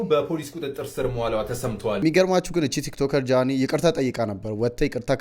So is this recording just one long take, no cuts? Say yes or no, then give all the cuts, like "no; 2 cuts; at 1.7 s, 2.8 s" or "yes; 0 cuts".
no; 1 cut; at 2.0 s